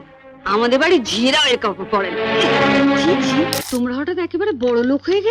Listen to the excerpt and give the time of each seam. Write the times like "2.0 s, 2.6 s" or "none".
3.6 s